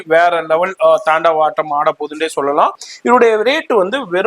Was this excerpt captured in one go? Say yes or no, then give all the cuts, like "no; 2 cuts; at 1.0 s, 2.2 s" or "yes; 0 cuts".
no; 1 cut; at 2.9 s